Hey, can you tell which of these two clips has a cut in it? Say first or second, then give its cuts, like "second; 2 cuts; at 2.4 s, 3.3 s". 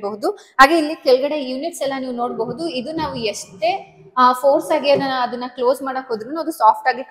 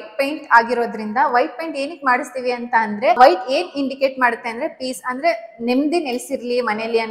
second; 1 cut; at 3.2 s